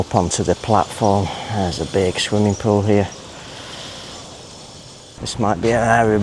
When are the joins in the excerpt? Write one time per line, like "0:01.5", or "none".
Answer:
0:05.2